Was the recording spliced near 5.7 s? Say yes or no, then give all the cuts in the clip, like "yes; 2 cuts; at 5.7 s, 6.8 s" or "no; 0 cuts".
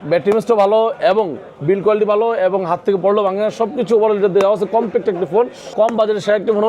yes; 1 cut; at 5.7 s